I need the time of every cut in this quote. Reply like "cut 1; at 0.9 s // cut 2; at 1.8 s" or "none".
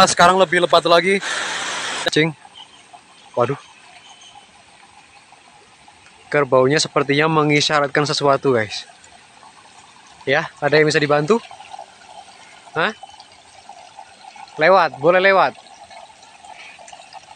cut 1; at 2.1 s